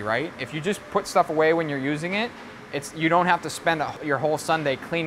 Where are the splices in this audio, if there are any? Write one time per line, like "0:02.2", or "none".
0:04.0